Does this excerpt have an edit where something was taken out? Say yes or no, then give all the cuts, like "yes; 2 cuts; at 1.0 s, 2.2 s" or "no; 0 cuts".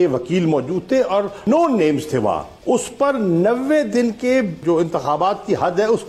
yes; 3 cuts; at 1.4 s, 2.5 s, 4.6 s